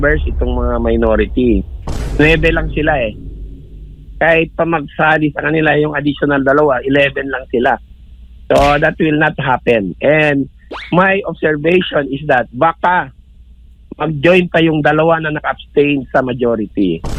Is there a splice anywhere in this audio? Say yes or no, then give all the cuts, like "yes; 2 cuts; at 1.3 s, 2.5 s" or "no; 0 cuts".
no; 0 cuts